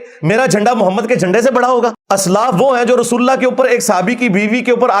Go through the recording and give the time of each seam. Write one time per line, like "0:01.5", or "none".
0:02.0